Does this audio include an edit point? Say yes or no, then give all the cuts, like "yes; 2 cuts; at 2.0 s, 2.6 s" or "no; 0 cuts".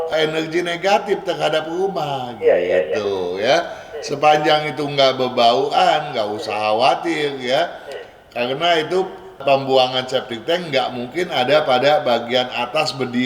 no; 0 cuts